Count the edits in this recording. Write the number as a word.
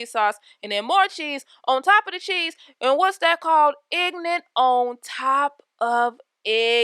zero